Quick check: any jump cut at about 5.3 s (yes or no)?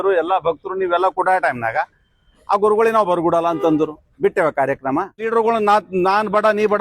yes